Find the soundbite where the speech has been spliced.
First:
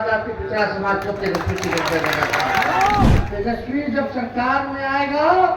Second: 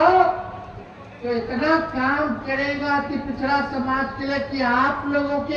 first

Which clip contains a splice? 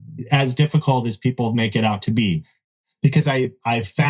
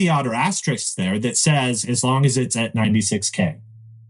first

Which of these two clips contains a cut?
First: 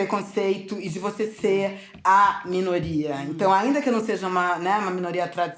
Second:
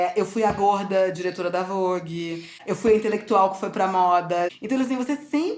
second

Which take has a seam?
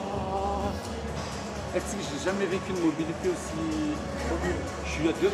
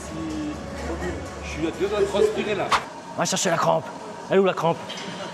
second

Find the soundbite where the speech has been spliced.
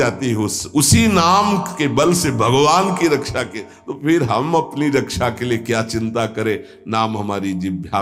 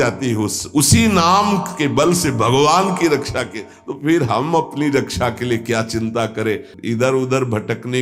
second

